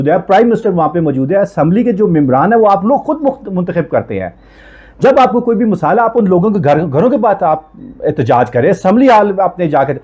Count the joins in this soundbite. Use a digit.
0